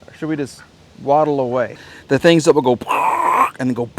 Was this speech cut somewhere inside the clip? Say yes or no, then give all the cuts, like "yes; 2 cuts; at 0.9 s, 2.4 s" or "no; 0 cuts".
yes; 1 cut; at 1.9 s